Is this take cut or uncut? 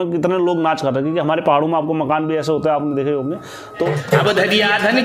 uncut